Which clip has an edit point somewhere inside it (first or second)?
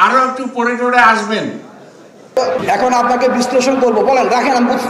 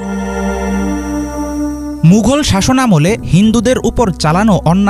first